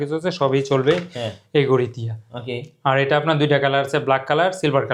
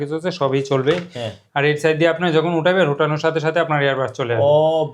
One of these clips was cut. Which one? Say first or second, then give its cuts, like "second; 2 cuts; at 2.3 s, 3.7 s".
second; 1 cut; at 1.4 s